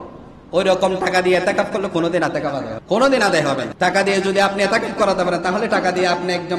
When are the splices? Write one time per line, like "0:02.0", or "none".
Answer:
0:02.7
0:03.7

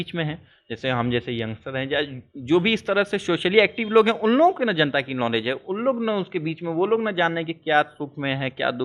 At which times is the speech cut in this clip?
none

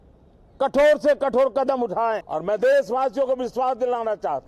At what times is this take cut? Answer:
0:02.3

